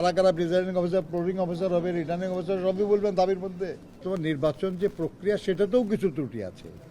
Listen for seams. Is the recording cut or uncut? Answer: cut